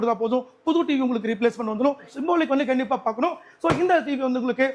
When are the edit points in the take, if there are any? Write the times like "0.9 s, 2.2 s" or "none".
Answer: 2.1 s